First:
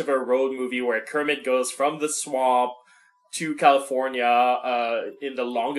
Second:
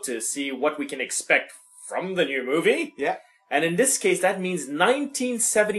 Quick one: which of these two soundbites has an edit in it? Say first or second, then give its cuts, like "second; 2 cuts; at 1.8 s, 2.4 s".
second; 1 cut; at 1.2 s